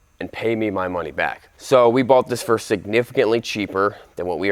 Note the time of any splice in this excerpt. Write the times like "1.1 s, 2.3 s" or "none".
none